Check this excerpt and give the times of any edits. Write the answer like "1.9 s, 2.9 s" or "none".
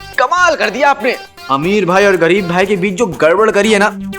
1.3 s

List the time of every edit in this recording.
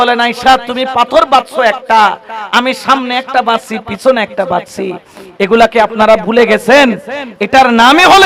none

